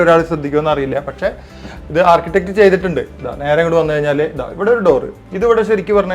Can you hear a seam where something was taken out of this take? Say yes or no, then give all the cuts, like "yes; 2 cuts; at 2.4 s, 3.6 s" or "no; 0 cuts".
no; 0 cuts